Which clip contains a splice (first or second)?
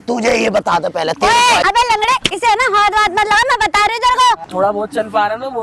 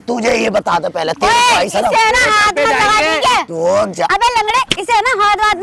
first